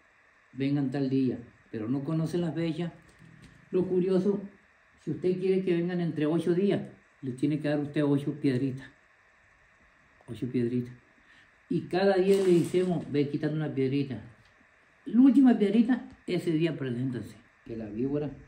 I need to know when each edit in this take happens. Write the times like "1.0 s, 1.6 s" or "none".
17.5 s